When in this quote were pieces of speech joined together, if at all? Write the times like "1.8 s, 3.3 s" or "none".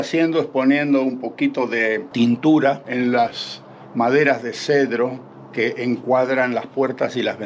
none